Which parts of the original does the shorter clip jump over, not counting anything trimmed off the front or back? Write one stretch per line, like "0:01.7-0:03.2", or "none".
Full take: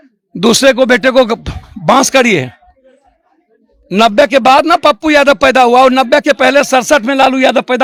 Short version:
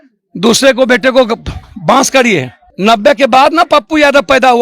0:02.6-0:03.7